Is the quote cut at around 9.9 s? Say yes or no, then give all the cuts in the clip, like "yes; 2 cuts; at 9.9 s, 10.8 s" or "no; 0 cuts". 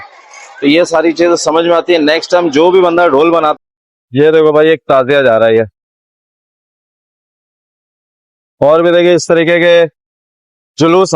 no; 1 cut; at 3.5 s